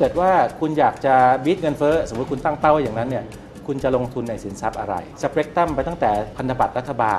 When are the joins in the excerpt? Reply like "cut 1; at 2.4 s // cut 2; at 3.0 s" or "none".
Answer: cut 1; at 5.1 s // cut 2; at 6.3 s